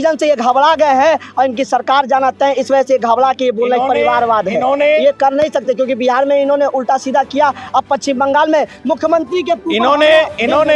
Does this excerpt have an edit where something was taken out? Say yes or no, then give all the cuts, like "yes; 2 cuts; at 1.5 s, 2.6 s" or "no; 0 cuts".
no; 0 cuts